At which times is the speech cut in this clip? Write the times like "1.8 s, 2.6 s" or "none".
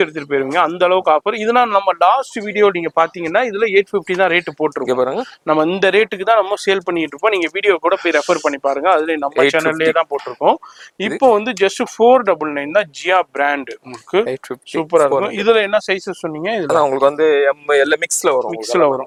none